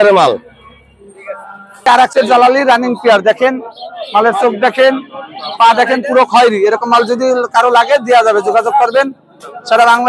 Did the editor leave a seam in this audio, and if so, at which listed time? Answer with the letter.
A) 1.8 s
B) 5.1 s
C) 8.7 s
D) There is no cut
A